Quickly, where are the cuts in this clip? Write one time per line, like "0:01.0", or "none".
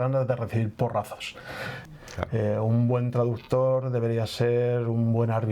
0:01.8